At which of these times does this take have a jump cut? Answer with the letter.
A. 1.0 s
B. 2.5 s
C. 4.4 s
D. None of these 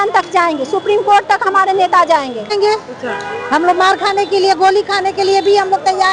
B